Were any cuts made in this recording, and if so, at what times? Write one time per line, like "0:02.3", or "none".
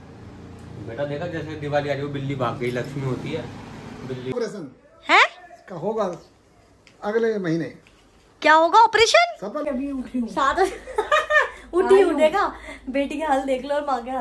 0:04.3
0:09.6